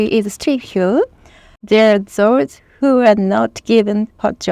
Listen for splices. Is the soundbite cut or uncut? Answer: cut